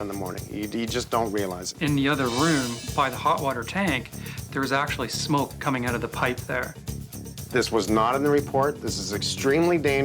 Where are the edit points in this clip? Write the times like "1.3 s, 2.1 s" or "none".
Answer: 1.7 s, 7.1 s

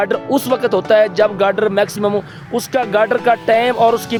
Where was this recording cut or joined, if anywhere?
none

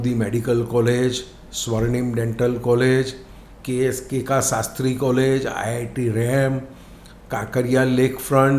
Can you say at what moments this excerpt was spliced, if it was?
none

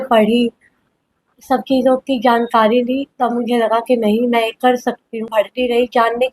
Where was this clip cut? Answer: 5.2 s

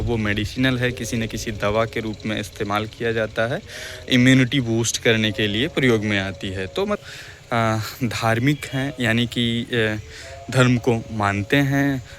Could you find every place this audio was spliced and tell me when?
7.0 s

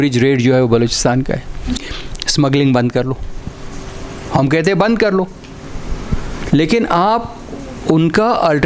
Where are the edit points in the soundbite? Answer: 1.8 s

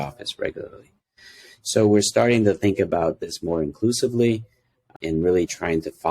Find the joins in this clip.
4.9 s

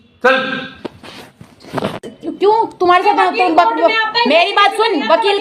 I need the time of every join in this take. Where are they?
2.0 s

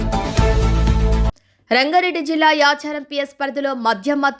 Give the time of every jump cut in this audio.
1.5 s

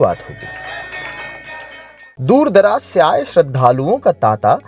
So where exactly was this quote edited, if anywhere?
1.8 s

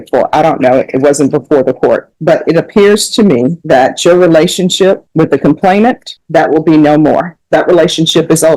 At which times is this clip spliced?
2.1 s, 3.6 s, 5.1 s, 6.1 s, 7.4 s

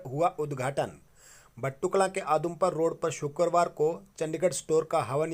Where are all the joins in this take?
none

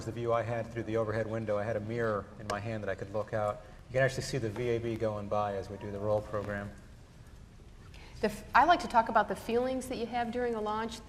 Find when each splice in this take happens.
5.4 s

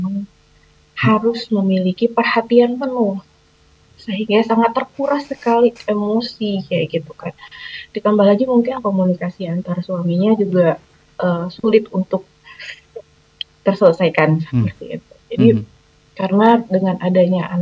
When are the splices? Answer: none

